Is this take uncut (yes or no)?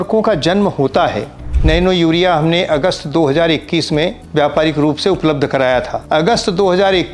no